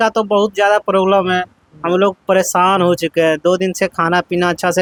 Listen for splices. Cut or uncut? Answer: uncut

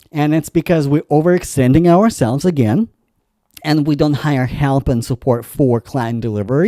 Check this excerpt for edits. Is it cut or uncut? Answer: uncut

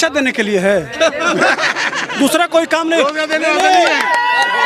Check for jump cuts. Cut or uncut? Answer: uncut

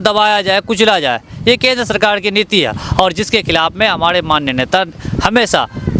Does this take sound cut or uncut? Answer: uncut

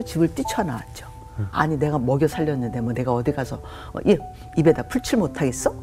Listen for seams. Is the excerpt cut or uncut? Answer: cut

